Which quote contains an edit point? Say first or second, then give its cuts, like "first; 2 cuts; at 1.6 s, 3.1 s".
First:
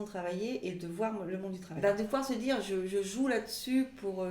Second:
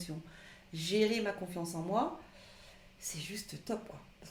first; 1 cut; at 1.6 s